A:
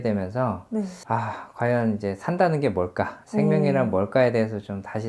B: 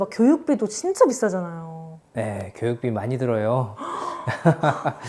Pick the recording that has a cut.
A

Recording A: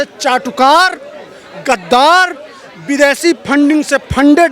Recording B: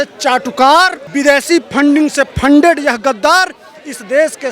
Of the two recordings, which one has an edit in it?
B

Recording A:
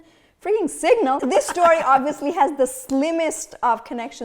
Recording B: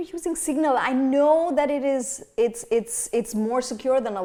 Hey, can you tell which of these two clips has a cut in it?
A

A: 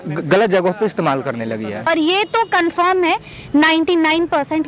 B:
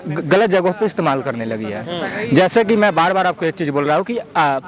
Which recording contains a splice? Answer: A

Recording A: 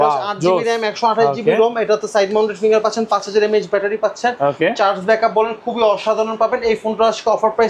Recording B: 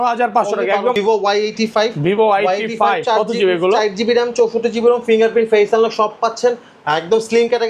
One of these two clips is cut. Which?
B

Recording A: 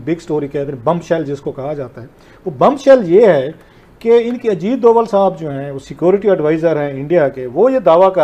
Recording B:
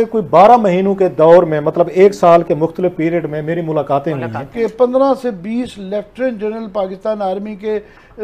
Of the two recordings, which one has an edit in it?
B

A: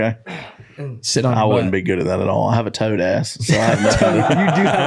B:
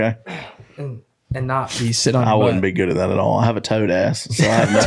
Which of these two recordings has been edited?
A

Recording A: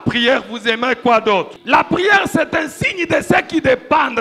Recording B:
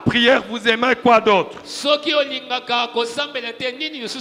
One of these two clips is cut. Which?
A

